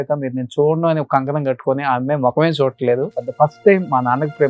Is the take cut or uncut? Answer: cut